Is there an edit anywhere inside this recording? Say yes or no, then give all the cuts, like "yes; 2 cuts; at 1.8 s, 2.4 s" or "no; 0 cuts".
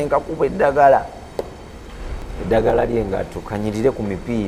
no; 0 cuts